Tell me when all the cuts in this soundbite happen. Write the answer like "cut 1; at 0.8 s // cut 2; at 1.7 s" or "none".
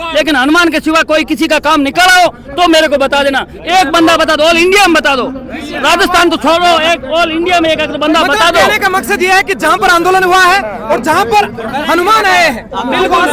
none